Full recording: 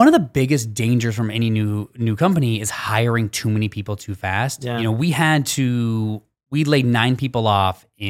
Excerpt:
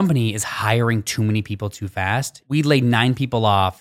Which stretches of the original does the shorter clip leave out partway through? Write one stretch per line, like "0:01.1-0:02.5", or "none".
0:04.6-0:06.3